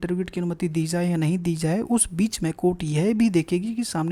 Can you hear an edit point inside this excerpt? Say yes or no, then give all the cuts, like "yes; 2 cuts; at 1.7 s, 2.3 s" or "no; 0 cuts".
no; 0 cuts